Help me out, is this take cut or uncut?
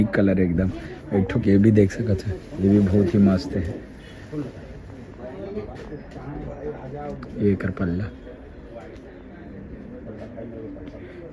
uncut